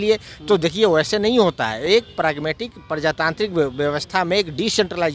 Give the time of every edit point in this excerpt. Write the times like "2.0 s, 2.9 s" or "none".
none